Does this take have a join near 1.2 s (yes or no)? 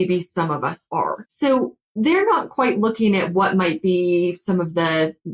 yes